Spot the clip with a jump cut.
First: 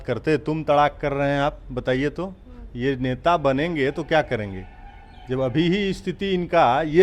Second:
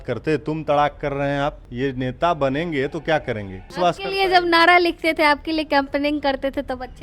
second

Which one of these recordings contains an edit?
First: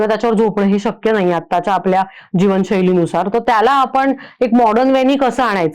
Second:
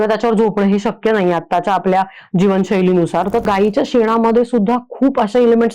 second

